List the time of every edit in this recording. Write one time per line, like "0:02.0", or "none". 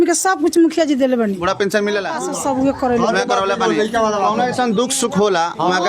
0:02.1